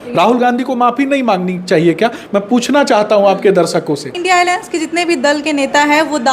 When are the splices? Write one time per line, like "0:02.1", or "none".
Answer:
0:04.1